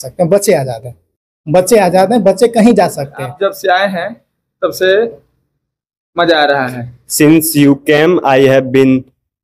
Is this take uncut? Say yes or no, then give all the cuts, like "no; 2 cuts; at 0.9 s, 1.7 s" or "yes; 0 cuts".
no; 1 cut; at 3.3 s